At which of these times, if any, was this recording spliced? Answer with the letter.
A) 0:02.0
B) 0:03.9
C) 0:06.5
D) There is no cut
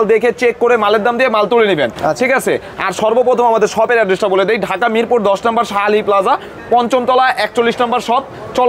D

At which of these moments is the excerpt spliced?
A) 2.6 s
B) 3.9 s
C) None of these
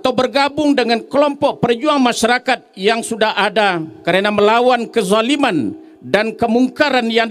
B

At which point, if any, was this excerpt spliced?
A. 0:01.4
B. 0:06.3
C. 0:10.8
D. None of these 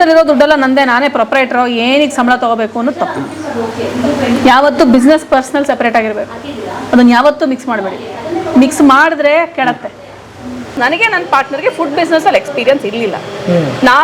C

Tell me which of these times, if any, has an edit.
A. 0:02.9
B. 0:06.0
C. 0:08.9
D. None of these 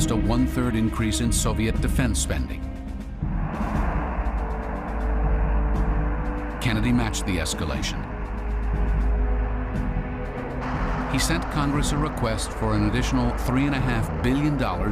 A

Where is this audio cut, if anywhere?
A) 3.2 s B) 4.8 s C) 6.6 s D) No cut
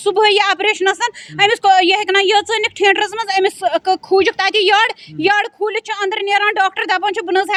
D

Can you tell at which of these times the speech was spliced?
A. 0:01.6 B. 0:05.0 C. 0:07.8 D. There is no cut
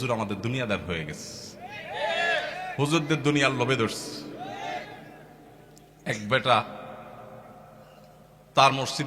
D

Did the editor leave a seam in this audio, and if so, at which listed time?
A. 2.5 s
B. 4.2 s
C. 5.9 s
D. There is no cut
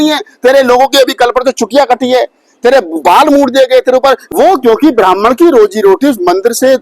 B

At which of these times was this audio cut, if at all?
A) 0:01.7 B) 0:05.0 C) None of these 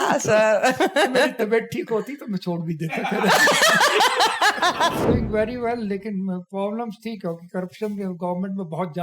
B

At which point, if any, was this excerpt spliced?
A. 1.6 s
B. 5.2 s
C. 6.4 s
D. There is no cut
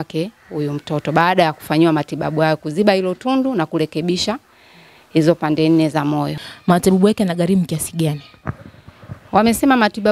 C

